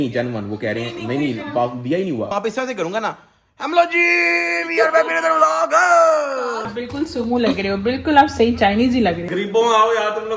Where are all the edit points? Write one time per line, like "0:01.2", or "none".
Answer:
0:02.3
0:06.6
0:09.3